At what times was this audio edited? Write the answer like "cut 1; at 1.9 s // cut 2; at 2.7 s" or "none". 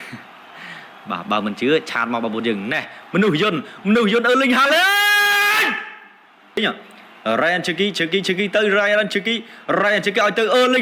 cut 1; at 6.6 s